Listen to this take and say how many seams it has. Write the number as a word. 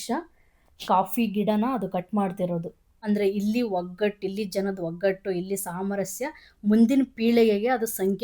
one